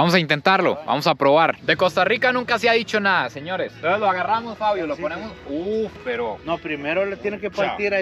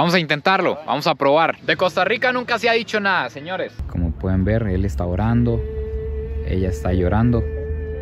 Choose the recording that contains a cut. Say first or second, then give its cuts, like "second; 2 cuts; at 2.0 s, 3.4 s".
second; 1 cut; at 3.7 s